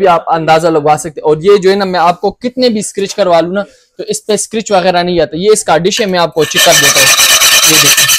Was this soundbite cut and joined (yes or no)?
no